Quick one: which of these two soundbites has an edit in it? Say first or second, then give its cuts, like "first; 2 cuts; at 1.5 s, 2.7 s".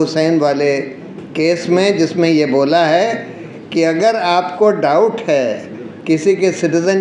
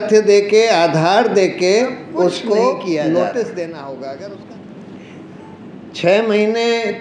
second; 1 cut; at 4.3 s